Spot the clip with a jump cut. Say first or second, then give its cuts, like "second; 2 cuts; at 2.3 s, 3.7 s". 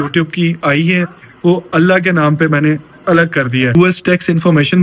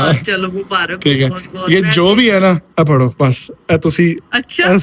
first; 1 cut; at 3.8 s